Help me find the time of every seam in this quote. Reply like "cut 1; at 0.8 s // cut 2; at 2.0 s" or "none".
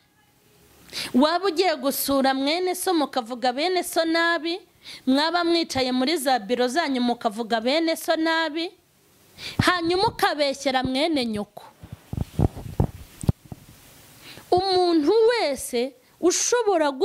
cut 1; at 13.3 s

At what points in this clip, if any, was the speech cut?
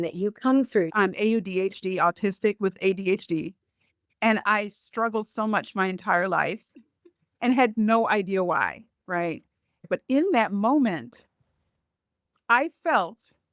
cut 1; at 0.9 s // cut 2; at 9.9 s

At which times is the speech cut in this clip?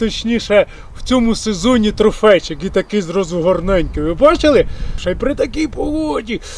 cut 1; at 5.0 s

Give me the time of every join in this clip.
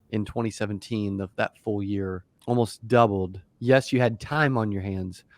cut 1; at 2.3 s

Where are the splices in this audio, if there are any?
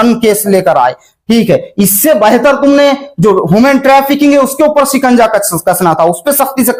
none

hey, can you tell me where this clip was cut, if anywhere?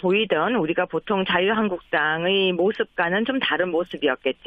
cut 1; at 2.9 s

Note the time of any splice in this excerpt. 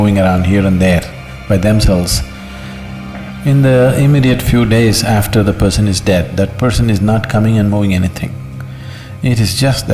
none

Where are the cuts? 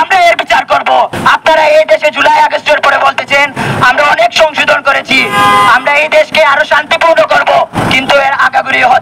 cut 1; at 1.1 s

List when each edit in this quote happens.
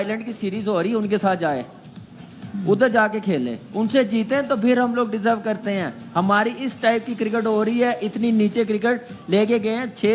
none

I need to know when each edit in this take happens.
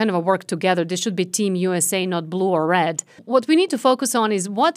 cut 1; at 3.1 s

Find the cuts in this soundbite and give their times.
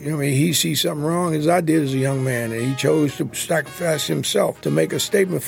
cut 1; at 3.3 s // cut 2; at 4.6 s

